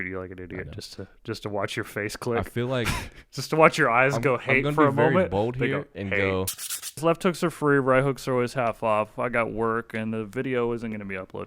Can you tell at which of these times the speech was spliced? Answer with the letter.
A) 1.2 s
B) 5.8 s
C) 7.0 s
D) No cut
C